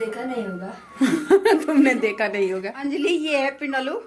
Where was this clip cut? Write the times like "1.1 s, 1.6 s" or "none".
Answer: 2.7 s